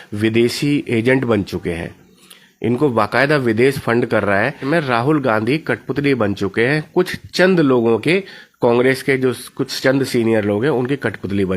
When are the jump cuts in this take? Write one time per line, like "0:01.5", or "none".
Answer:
0:04.6